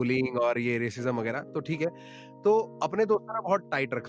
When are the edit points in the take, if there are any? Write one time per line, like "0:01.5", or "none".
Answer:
none